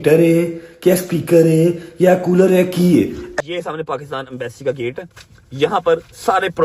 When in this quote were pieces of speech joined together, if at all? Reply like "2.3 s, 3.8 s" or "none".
3.2 s